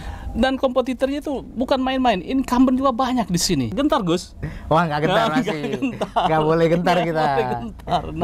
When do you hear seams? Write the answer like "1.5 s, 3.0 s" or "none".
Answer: 3.7 s